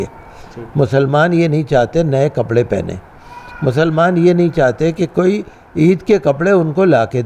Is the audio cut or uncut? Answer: uncut